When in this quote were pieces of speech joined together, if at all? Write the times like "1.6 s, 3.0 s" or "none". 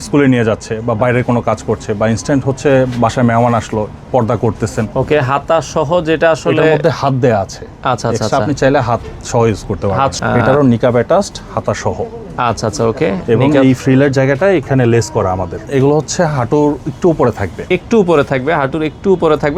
4.9 s, 10.2 s, 15.6 s